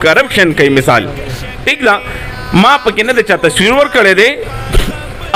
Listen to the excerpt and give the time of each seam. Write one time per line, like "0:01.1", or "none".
none